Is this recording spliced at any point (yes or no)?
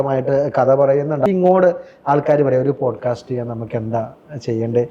yes